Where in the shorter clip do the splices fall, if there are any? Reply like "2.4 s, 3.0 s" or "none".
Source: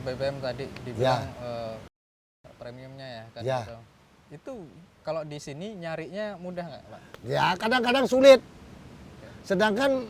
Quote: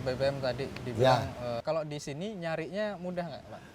1.6 s